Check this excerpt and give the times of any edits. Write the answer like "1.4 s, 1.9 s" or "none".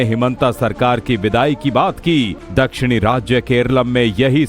1.8 s